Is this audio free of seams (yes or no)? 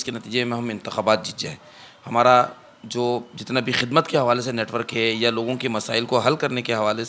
yes